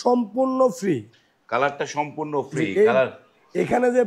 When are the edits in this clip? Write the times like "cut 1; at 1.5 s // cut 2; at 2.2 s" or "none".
none